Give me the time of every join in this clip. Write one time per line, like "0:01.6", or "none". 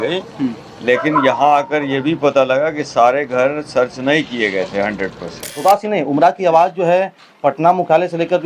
0:05.6
0:07.2